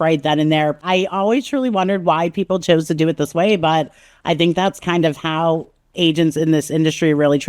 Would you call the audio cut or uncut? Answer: cut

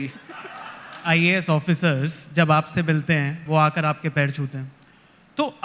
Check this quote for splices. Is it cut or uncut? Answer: cut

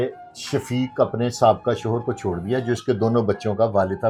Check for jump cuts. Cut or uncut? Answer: uncut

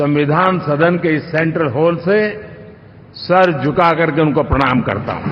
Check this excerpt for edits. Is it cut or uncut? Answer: uncut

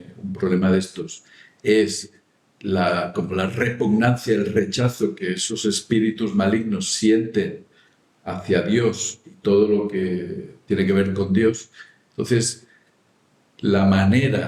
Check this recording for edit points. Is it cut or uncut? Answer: uncut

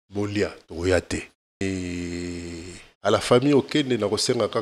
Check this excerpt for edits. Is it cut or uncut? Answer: cut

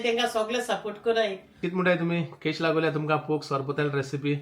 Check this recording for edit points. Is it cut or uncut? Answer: cut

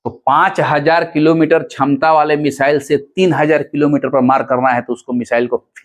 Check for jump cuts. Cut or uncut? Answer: uncut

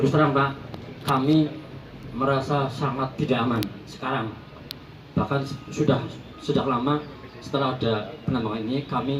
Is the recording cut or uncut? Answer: uncut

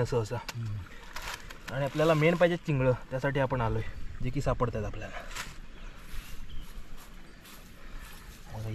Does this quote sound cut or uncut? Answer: uncut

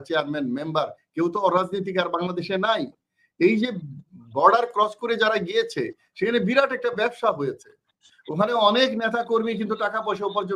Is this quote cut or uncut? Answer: uncut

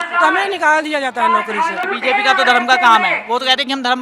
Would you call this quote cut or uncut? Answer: cut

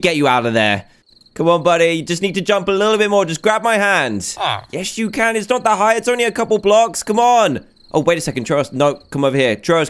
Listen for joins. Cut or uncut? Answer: uncut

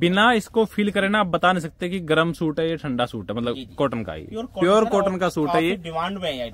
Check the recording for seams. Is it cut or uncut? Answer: uncut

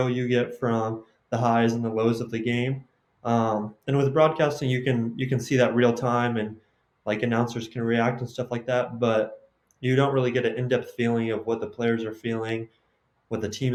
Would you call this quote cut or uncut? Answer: uncut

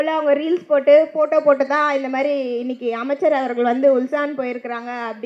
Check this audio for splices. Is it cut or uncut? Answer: uncut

